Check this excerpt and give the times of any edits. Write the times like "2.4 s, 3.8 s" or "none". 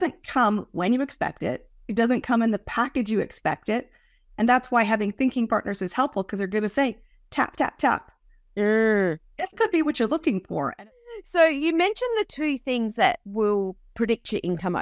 10.7 s

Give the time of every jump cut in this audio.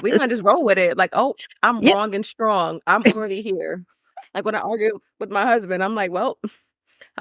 none

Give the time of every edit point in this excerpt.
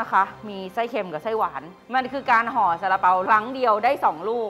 1.7 s, 3.2 s

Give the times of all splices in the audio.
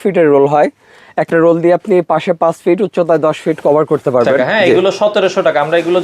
4.5 s

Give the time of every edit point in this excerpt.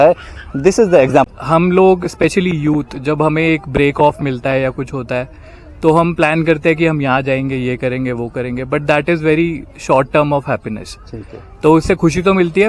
1.3 s

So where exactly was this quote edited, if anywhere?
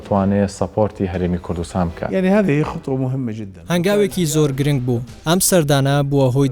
2.0 s, 3.5 s, 5.1 s

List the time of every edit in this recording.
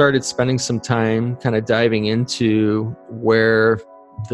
none

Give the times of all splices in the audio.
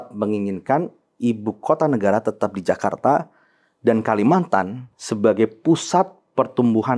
none

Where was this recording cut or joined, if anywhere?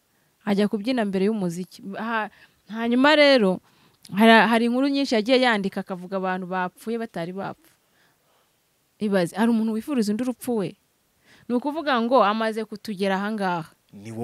none

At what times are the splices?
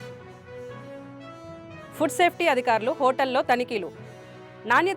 1.6 s

